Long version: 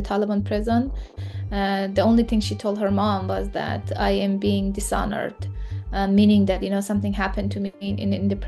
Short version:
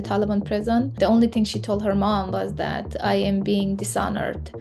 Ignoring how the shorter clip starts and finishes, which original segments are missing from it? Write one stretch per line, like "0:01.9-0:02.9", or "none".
0:00.9-0:01.9